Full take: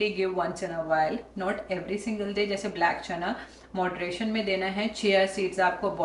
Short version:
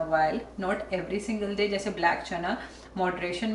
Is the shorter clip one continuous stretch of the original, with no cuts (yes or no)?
yes